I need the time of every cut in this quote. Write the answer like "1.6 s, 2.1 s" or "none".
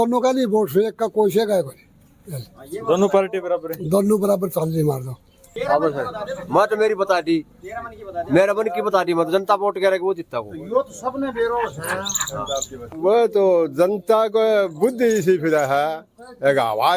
5.5 s, 12.8 s